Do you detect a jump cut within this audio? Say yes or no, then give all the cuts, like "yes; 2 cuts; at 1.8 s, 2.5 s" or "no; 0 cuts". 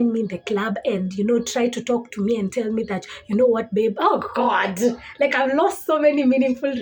no; 0 cuts